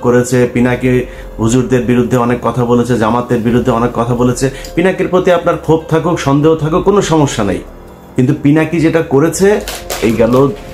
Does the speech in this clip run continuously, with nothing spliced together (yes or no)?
yes